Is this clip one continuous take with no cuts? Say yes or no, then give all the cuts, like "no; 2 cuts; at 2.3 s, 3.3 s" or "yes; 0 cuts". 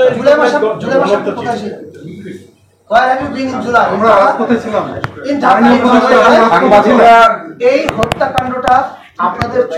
yes; 0 cuts